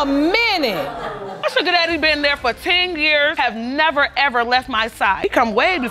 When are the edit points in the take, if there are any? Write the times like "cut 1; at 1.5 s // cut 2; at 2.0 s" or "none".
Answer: cut 1; at 1.4 s

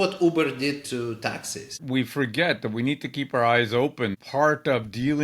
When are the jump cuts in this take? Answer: cut 1; at 1.8 s // cut 2; at 4.1 s

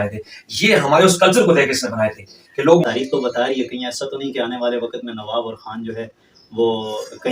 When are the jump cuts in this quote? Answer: cut 1; at 2.8 s

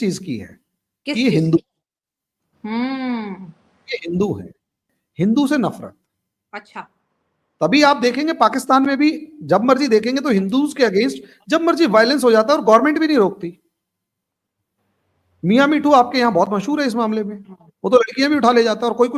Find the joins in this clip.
none

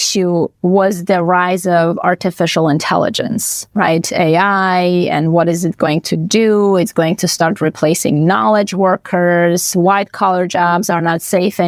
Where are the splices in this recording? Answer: none

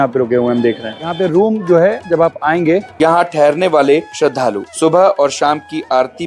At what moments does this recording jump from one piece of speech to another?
cut 1; at 1.1 s // cut 2; at 2.9 s

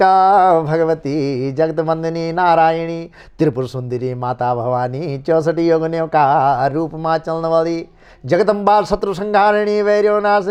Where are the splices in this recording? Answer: none

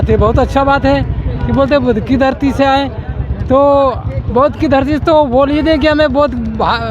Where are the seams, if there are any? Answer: none

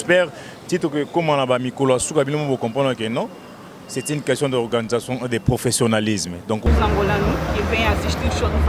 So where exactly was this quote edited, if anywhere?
cut 1; at 6.7 s

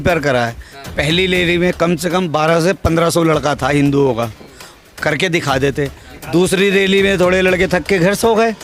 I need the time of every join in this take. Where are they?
none

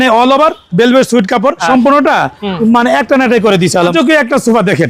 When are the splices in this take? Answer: cut 1; at 1.6 s // cut 2; at 3.9 s

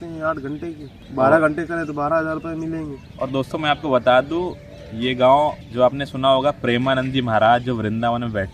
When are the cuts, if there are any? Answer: cut 1; at 0.9 s // cut 2; at 3.0 s // cut 3; at 5.6 s

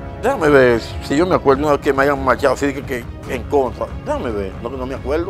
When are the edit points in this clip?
none

